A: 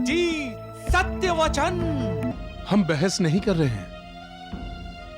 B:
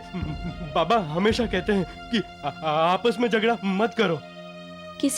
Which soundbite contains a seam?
A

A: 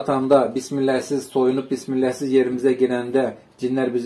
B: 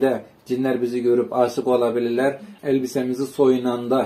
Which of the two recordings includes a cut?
B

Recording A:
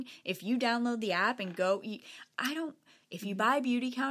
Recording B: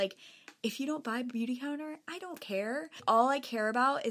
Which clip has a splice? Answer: B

